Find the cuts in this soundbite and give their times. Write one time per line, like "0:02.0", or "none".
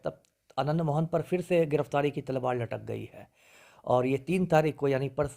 none